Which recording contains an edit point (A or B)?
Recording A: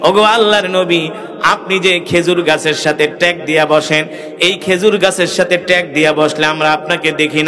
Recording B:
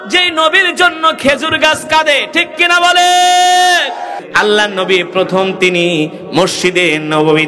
B